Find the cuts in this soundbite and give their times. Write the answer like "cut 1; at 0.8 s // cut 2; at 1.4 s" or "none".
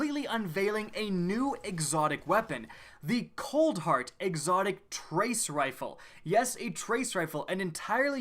cut 1; at 2.5 s